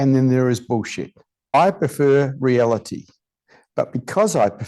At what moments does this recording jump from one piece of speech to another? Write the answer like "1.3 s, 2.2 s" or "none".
1.5 s